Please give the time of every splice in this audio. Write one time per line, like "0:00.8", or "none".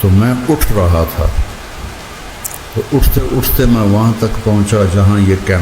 0:01.3
0:02.8